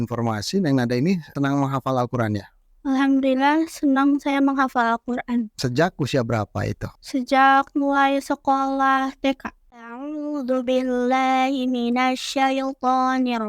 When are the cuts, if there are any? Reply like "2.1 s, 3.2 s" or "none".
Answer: 1.3 s, 5.6 s, 9.8 s